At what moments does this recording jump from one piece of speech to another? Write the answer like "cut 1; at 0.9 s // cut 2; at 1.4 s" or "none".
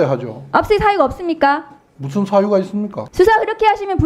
cut 1; at 3.0 s